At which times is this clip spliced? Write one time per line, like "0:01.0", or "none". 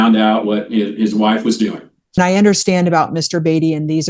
0:02.2